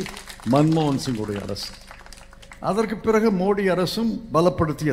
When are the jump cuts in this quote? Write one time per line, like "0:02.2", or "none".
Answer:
none